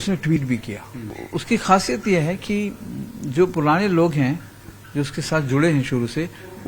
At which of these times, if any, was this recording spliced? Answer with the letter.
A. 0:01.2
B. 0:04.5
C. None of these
A